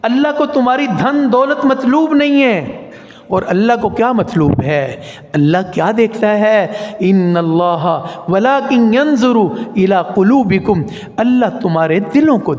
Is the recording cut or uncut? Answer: uncut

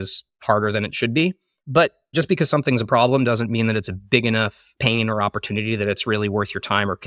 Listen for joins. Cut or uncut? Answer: cut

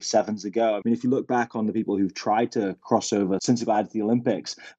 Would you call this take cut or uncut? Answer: cut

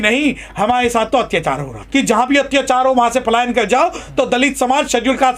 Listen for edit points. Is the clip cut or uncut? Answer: cut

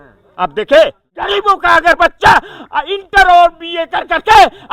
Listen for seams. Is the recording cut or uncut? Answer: cut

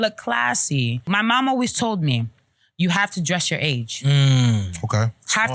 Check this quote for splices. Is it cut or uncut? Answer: cut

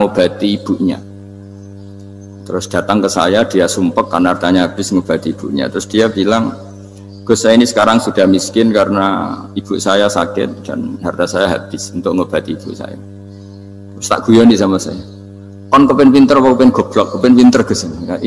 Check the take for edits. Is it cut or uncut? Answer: uncut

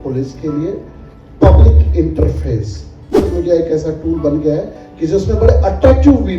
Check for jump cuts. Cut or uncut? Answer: cut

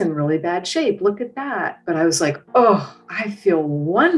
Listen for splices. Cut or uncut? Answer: uncut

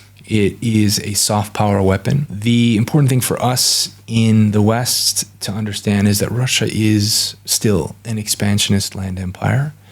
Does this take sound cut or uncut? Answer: cut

